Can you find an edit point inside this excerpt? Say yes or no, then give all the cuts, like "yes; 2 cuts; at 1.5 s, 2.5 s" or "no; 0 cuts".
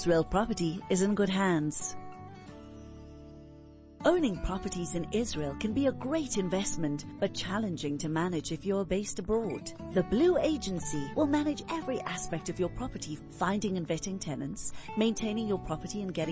yes; 2 cuts; at 1.8 s, 3.9 s